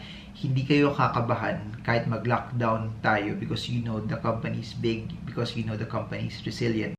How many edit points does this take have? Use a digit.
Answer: 0